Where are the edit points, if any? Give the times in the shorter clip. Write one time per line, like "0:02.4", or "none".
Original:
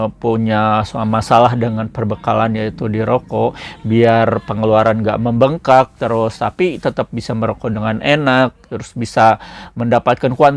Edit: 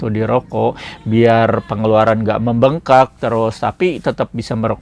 none